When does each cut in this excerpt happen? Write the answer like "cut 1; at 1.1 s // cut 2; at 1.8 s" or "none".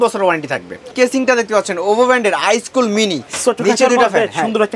cut 1; at 0.9 s